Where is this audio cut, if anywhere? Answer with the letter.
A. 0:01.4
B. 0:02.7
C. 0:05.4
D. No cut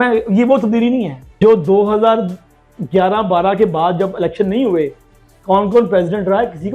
A